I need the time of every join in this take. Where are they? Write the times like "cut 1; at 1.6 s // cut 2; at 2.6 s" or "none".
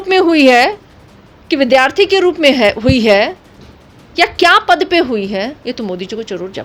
none